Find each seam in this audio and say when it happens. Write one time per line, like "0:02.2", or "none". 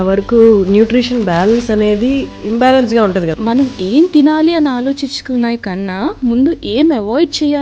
0:02.3
0:03.3